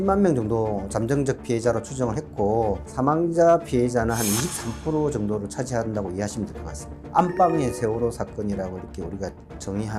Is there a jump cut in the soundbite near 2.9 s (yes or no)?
yes